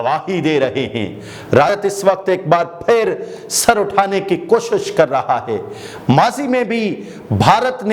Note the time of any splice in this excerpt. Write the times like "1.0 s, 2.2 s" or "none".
1.7 s